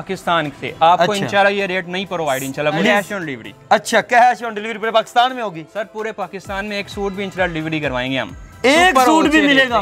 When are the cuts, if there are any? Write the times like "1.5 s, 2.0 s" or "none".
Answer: 2.8 s